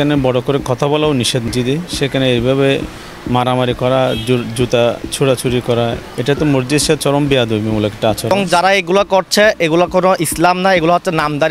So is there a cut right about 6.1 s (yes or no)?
yes